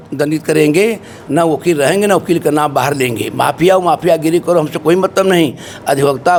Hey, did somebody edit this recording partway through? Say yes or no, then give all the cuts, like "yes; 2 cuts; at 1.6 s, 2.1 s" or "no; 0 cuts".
no; 0 cuts